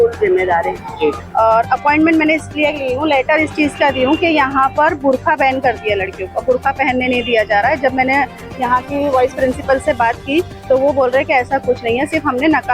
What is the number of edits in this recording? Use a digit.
1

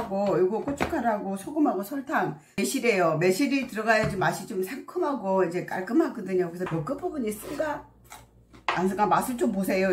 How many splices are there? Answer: 2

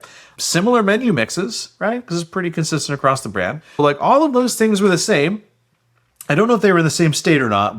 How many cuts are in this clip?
1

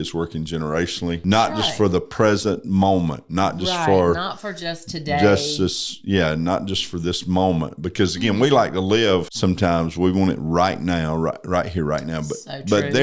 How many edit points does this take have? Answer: 2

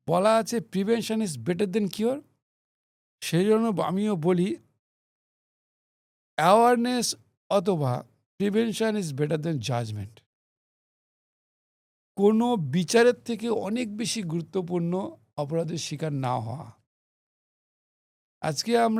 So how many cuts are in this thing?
0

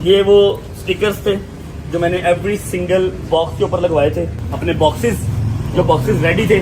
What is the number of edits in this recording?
1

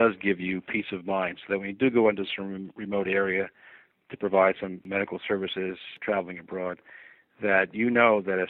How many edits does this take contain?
2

